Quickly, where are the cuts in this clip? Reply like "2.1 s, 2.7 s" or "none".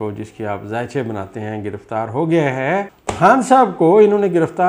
3.0 s